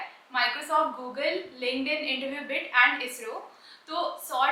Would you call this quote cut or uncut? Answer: uncut